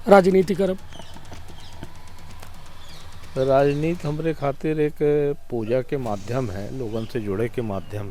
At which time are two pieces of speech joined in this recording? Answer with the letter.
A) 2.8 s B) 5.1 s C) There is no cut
C